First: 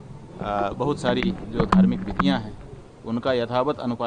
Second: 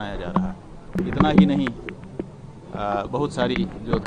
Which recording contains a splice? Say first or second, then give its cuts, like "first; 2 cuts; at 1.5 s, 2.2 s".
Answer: second; 1 cut; at 1.0 s